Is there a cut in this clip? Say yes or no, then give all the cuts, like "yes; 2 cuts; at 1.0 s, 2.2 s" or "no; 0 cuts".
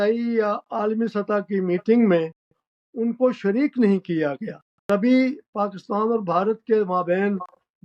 yes; 1 cut; at 4.9 s